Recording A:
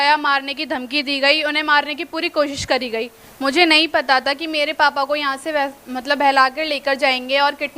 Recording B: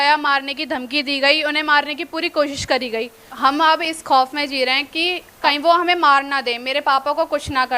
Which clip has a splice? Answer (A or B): B